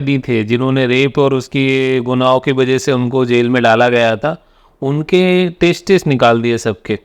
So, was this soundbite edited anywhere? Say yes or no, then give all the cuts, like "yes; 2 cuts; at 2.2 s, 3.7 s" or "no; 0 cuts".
no; 0 cuts